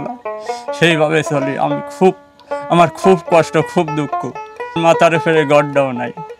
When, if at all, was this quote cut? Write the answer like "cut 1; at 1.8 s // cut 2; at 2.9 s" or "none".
cut 1; at 4.8 s